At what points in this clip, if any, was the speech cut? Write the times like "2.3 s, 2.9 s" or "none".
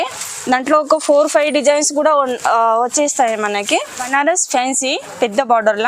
4.1 s